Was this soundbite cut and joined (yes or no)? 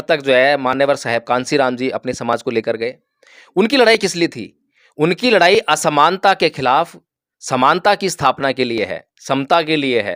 no